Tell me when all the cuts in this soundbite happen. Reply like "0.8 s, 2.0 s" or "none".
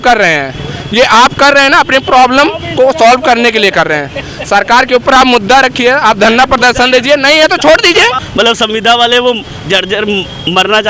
8.2 s